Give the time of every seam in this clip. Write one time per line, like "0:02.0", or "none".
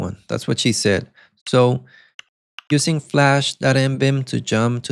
none